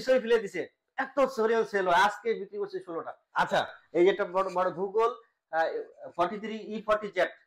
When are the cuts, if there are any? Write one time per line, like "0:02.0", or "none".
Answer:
none